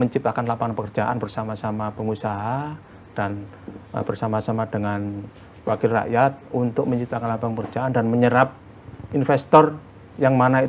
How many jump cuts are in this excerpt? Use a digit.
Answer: 0